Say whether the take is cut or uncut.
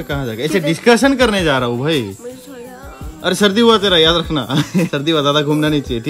uncut